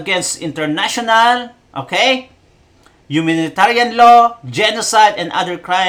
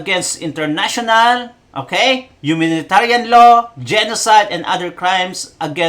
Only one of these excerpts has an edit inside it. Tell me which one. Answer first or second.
second